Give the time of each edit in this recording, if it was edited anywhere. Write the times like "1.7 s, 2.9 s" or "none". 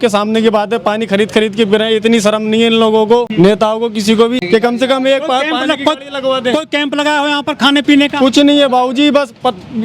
3.3 s, 4.4 s